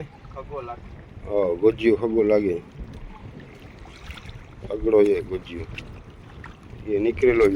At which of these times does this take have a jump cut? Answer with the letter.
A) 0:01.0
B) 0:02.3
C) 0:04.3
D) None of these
D